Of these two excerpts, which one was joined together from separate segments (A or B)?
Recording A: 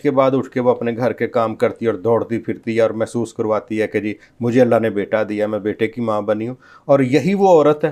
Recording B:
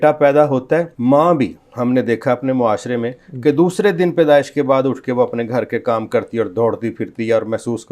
B